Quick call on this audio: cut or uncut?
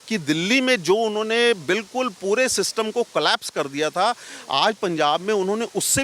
uncut